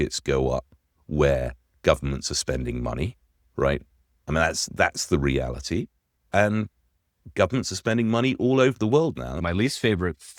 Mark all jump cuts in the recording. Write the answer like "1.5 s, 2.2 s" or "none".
9.4 s